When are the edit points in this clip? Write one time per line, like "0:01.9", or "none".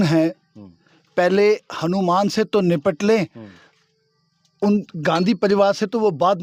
none